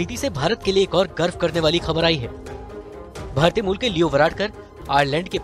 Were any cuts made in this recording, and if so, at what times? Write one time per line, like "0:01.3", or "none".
none